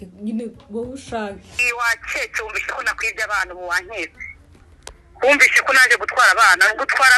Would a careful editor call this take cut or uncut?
cut